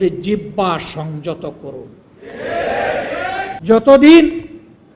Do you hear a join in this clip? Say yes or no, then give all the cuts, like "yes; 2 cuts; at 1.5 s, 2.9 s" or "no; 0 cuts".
yes; 1 cut; at 3.6 s